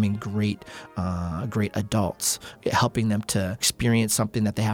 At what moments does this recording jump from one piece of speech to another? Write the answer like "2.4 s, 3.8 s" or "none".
2.5 s, 3.7 s